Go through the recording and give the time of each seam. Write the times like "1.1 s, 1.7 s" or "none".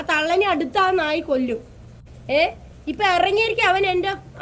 2.0 s

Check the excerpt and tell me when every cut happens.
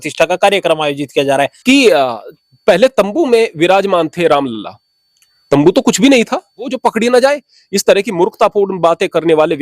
1.5 s, 6.7 s

